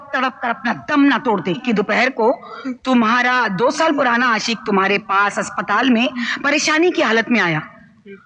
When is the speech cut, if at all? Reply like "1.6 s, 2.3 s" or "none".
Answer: 1.6 s